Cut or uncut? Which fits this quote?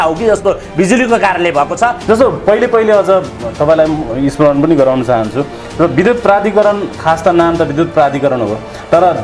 cut